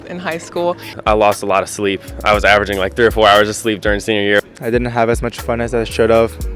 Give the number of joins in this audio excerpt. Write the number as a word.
two